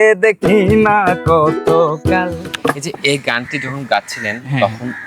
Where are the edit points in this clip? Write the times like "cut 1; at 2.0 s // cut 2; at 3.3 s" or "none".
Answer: cut 1; at 2.5 s